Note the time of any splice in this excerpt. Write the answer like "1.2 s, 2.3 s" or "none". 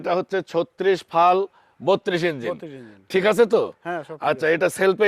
none

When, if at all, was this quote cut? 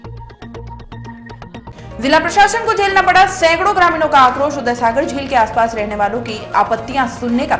1.6 s

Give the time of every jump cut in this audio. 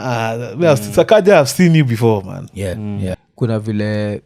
3.2 s

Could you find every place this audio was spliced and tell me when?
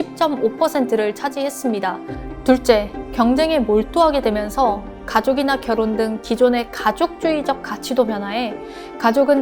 2.1 s

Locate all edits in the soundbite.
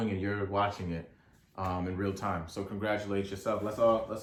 none

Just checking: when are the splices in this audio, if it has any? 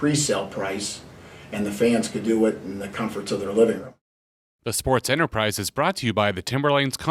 3.9 s

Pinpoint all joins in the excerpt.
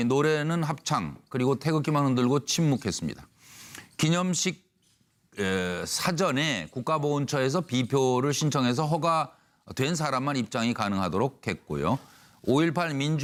none

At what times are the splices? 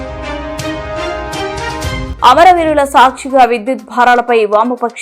2.1 s

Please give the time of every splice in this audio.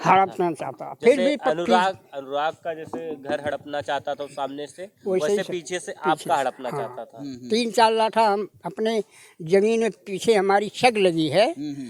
none

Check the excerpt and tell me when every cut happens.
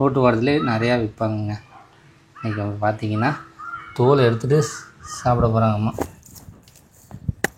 5.9 s

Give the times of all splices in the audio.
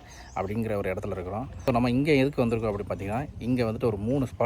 1.5 s

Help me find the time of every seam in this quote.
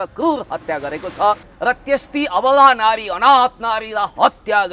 1.5 s

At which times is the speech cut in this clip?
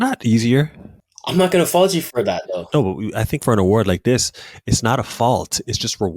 1.1 s

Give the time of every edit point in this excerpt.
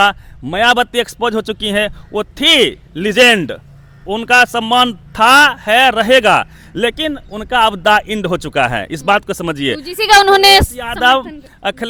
none

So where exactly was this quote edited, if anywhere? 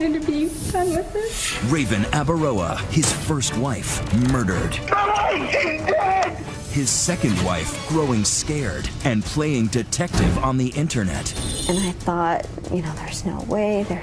none

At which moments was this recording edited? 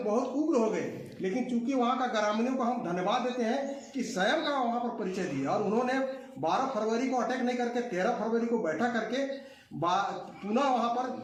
none

